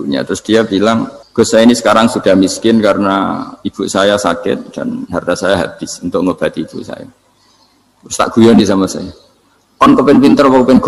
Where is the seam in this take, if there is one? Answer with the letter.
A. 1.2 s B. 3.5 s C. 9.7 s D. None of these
A